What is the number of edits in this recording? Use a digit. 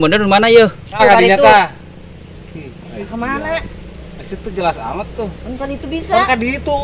0